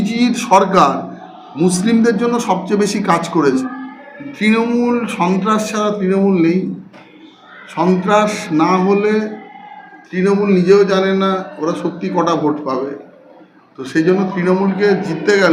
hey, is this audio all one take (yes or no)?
no